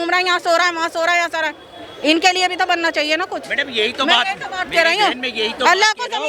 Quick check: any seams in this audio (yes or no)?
no